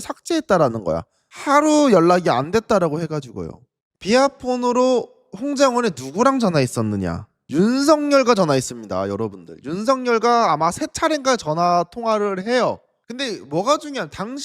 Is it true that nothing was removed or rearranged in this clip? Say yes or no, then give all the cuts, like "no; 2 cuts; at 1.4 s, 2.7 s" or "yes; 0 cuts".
no; 1 cut; at 12.9 s